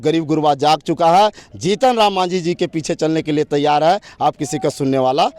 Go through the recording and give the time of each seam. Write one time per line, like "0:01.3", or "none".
none